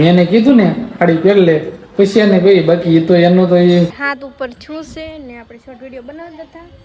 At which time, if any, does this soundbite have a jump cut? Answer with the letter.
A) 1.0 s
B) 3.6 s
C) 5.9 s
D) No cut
B